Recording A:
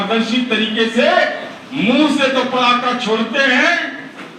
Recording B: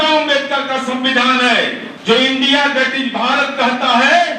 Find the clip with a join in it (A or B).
B